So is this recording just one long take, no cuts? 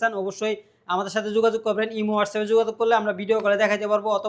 yes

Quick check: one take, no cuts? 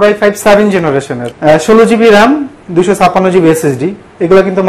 no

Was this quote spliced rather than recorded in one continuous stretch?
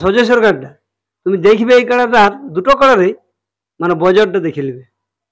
no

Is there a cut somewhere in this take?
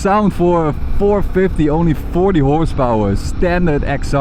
no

